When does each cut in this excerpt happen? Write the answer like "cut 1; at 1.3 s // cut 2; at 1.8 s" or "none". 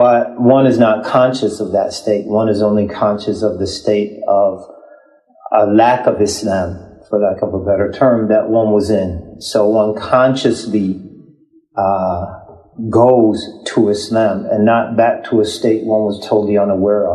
cut 1; at 12.9 s